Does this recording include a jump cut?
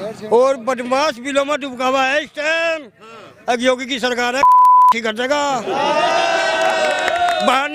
no; 0 cuts

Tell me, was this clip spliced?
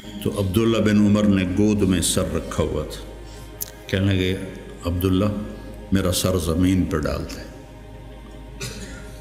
no; 0 cuts

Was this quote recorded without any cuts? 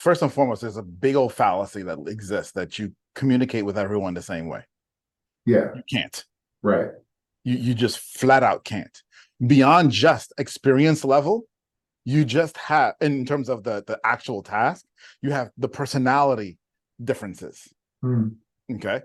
yes; 0 cuts

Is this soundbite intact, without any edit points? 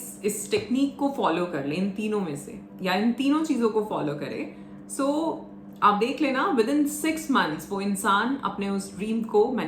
yes; 0 cuts

